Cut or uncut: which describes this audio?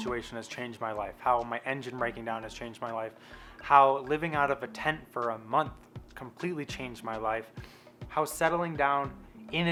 uncut